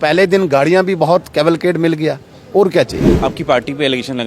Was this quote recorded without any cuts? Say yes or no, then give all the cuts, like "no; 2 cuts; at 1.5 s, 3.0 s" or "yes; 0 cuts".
no; 1 cut; at 3.1 s